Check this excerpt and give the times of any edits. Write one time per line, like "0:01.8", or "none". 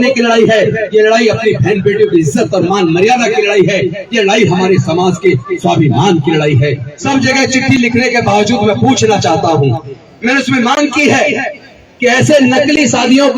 0:06.9